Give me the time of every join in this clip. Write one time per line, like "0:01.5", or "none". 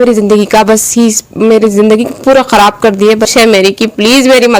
0:03.3